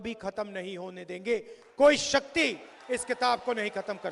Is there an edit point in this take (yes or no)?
no